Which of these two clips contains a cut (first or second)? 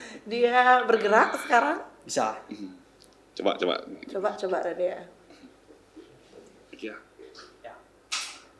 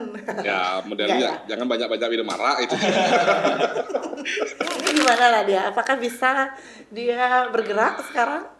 second